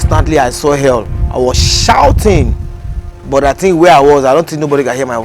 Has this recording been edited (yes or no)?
yes